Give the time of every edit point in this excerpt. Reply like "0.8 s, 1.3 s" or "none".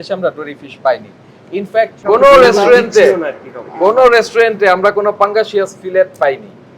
2.0 s